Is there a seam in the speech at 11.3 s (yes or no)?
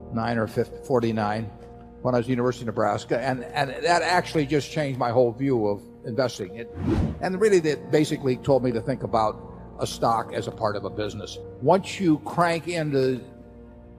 yes